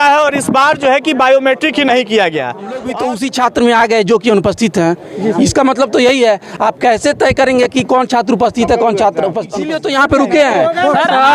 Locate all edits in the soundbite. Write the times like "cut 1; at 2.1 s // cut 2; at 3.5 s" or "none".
cut 1; at 2.5 s // cut 2; at 9.8 s